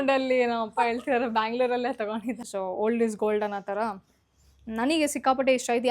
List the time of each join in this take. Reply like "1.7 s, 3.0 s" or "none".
2.4 s